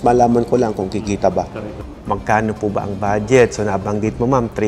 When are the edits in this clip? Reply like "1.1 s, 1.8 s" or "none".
1.8 s